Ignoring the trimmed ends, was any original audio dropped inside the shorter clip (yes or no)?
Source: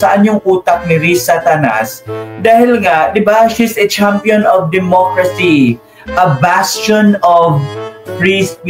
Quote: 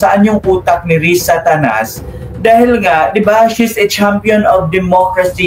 no